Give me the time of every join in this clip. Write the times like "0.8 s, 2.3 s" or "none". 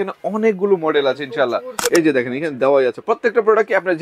1.8 s